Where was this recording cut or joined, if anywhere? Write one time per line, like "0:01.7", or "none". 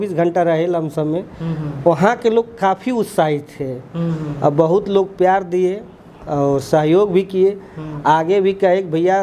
none